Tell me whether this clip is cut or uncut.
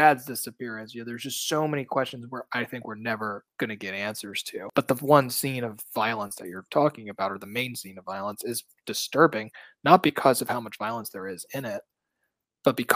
cut